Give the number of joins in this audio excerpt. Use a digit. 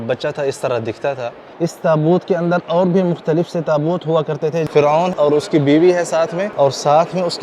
3